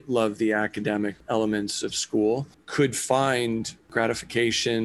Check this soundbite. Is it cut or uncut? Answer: cut